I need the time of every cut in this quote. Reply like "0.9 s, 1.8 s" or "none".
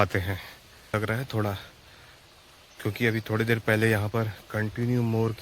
0.9 s